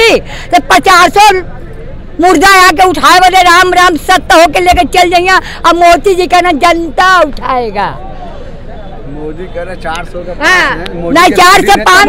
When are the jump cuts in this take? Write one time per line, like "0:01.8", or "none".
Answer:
none